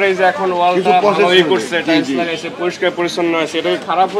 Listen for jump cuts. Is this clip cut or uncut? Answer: uncut